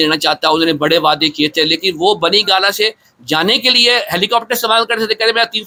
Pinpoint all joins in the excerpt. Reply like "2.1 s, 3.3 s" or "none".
none